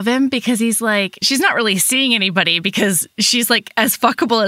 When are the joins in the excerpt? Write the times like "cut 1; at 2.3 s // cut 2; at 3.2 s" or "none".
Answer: cut 1; at 1.2 s